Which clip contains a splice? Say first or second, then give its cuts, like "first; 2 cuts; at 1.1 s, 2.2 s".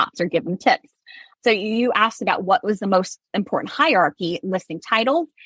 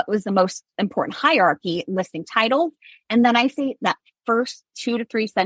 first; 1 cut; at 1.2 s